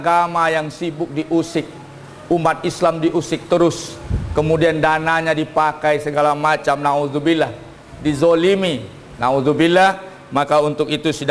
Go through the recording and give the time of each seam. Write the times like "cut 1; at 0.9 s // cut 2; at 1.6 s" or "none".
none